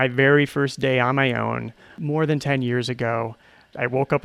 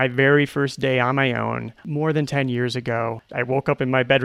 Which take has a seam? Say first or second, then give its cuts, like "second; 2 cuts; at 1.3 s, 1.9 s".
second; 2 cuts; at 1.8 s, 3.2 s